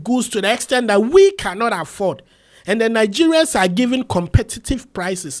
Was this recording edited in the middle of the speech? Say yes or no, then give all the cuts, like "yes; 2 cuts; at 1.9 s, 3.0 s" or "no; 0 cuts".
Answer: no; 0 cuts